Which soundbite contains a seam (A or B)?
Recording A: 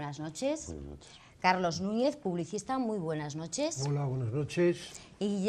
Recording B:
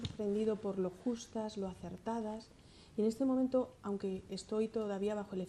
A